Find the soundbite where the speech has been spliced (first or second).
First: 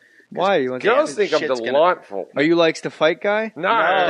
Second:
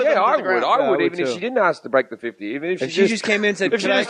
first